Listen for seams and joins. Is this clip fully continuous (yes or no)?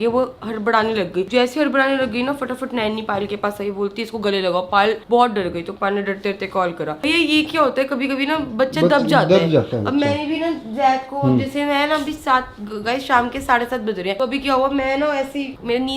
yes